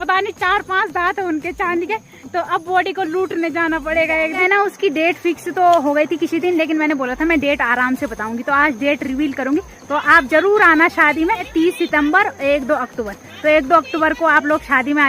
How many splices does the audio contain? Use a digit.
2